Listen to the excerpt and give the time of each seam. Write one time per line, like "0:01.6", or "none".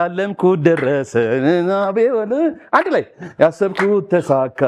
none